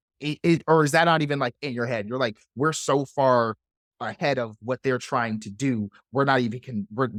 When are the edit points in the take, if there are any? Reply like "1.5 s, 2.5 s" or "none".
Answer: none